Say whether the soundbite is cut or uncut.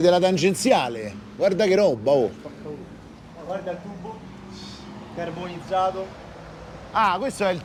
uncut